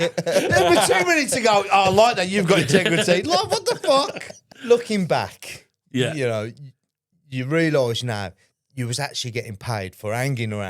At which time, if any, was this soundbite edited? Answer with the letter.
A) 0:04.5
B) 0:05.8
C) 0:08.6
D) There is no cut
A